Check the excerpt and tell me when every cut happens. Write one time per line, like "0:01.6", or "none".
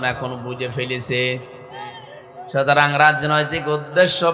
none